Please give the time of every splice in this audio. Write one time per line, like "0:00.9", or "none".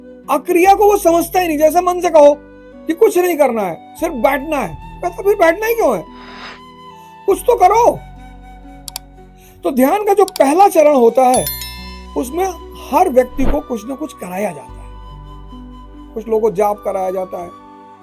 none